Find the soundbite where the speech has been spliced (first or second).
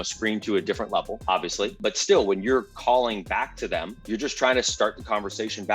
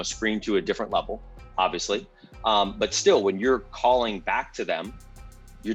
first